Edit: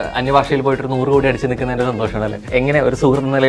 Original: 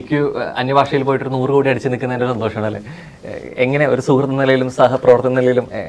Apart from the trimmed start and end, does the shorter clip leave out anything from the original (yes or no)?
yes